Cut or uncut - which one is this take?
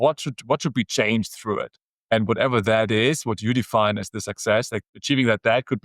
cut